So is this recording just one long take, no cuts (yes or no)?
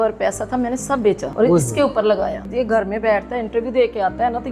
no